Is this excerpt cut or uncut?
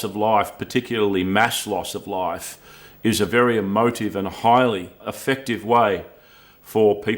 cut